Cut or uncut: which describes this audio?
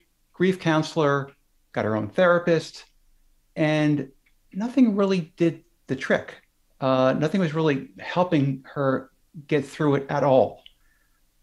uncut